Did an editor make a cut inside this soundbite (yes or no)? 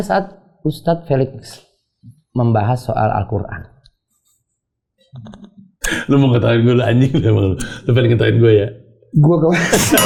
no